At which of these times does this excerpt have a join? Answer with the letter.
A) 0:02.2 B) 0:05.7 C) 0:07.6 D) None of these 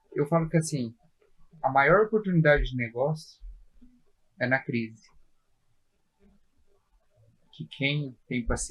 D